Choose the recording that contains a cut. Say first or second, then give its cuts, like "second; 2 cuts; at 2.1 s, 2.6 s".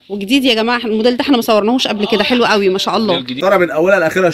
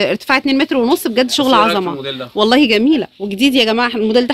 first; 1 cut; at 3.3 s